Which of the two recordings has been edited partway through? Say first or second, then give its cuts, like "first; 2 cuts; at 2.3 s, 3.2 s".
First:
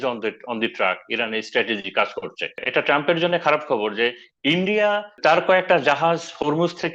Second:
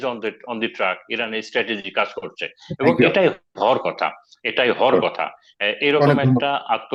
first; 2 cuts; at 2.6 s, 5.2 s